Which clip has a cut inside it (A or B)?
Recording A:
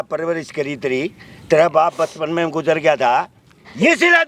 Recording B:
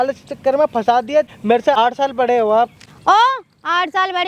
B